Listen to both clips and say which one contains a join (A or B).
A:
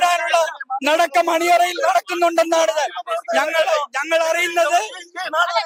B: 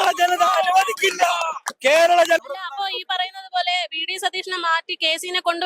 B